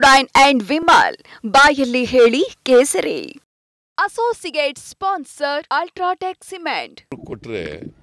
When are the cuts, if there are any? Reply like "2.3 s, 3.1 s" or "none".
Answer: 7.0 s